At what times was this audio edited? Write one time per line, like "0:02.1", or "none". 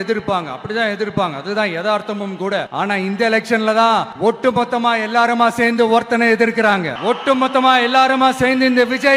0:02.7
0:04.1
0:06.9